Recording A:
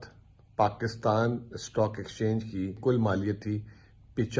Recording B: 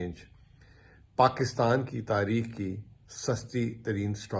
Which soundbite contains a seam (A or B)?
A